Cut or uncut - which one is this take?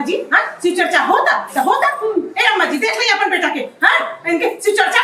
uncut